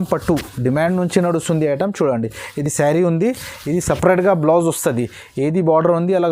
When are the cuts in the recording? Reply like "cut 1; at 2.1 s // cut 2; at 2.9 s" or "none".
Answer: none